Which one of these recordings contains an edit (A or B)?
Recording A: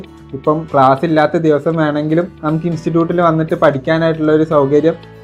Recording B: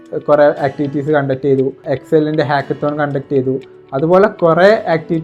B